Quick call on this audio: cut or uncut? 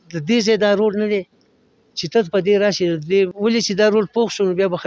cut